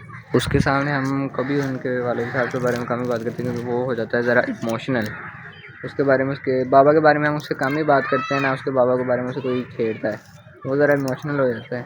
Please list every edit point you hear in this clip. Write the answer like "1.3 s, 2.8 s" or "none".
none